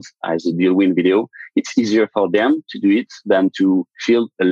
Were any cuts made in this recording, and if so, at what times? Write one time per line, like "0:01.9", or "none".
none